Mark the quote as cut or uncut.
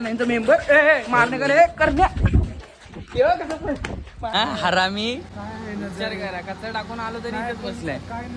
cut